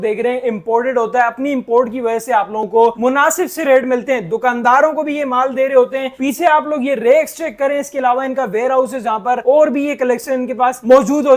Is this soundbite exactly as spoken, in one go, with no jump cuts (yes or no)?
yes